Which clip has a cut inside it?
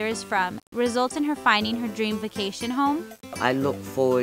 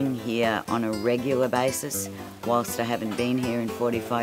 first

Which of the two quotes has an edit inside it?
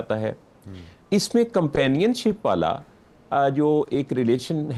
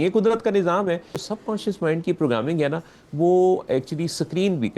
second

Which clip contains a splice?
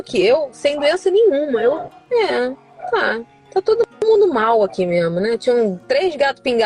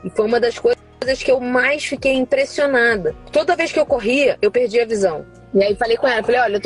second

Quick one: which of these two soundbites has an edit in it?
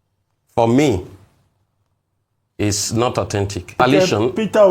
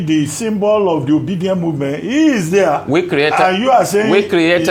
first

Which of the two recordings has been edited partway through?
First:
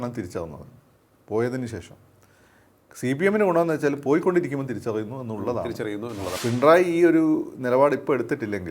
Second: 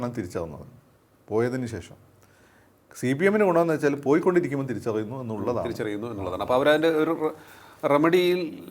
first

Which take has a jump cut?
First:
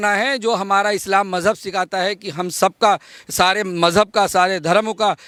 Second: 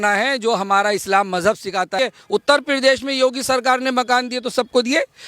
second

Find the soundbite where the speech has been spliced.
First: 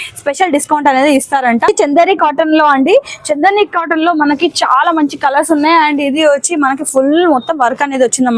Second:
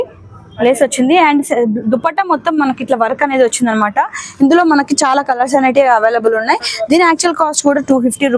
first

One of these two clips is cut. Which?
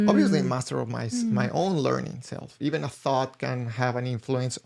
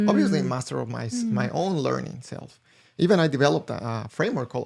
first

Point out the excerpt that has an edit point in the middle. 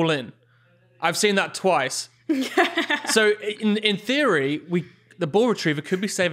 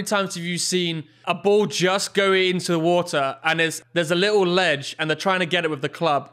second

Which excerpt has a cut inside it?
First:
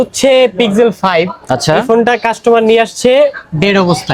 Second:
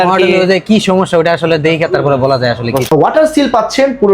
second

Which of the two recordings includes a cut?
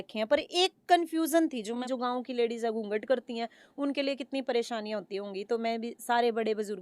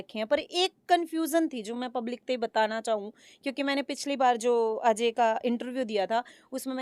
first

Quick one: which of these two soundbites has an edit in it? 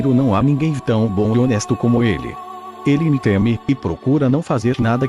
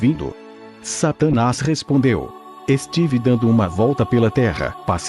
first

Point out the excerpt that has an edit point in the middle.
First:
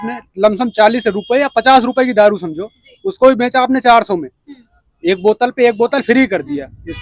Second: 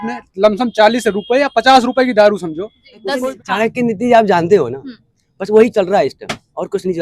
second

